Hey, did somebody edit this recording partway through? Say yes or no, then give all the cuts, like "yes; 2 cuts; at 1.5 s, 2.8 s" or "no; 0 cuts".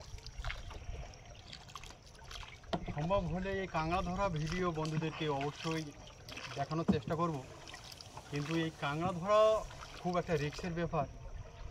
no; 0 cuts